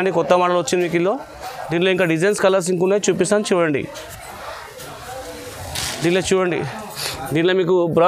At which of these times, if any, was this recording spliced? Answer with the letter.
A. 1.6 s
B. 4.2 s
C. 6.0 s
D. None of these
D